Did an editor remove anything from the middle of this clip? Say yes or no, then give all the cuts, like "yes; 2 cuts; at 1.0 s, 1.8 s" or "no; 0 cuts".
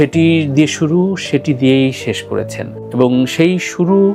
no; 0 cuts